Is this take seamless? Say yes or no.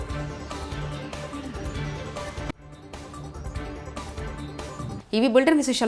yes